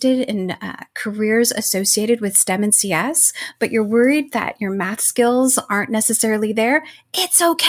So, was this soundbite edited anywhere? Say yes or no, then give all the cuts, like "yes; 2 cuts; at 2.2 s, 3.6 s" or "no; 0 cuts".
no; 0 cuts